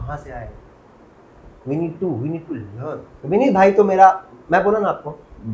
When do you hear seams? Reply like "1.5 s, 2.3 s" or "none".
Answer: 3.1 s